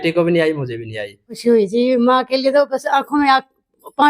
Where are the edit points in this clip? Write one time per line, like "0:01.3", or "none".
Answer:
0:01.3